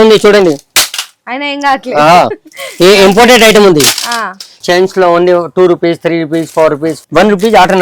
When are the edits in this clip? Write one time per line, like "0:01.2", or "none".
0:04.6
0:07.0